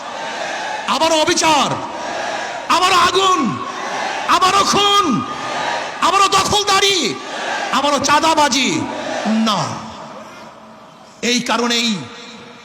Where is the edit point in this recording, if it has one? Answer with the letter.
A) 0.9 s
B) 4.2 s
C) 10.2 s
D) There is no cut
D